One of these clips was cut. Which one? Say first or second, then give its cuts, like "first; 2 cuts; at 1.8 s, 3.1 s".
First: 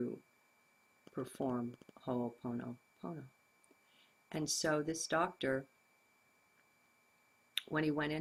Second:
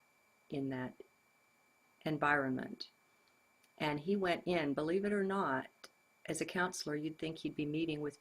second; 1 cut; at 6.8 s